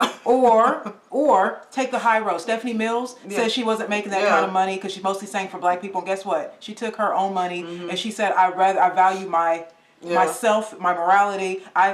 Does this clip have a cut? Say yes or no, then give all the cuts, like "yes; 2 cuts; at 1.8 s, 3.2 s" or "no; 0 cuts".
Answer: no; 0 cuts